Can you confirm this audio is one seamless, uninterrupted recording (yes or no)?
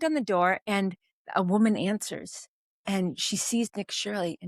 yes